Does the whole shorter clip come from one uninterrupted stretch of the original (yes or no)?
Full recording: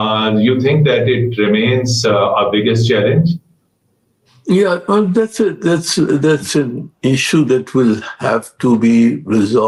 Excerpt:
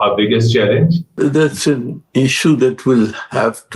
no